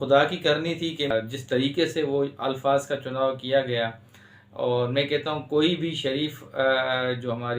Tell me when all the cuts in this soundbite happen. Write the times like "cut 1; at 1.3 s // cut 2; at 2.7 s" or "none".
cut 1; at 1.1 s

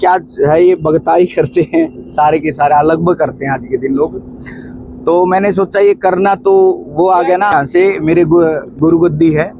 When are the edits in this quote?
cut 1; at 7.5 s

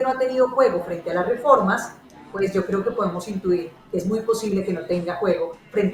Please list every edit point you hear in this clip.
none

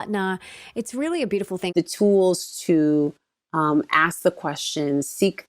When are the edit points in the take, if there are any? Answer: cut 1; at 1.7 s

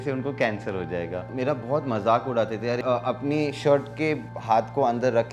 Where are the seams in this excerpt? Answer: cut 1; at 1.3 s // cut 2; at 2.8 s // cut 3; at 4.3 s

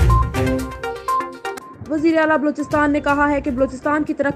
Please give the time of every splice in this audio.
cut 1; at 1.2 s

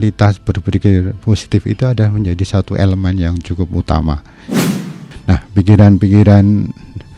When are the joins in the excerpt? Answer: cut 1; at 4.8 s

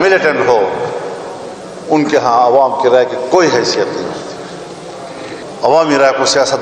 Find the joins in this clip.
cut 1; at 5.4 s

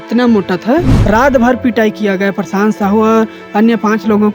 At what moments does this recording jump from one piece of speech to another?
cut 1; at 0.9 s

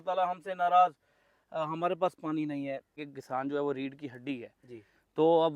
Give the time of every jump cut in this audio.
cut 1; at 3.1 s

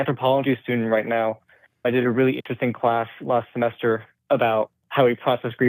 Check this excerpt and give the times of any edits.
cut 1; at 1.7 s

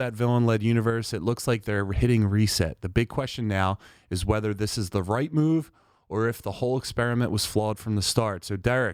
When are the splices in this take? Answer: none

